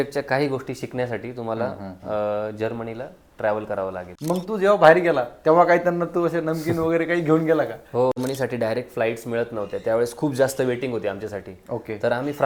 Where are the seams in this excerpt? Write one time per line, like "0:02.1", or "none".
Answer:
0:04.1
0:08.2